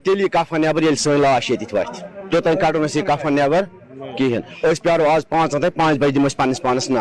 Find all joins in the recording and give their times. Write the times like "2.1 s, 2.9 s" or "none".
none